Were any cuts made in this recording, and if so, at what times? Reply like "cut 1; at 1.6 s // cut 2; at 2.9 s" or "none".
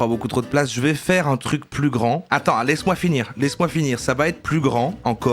none